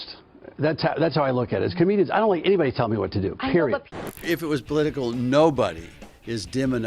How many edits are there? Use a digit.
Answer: 1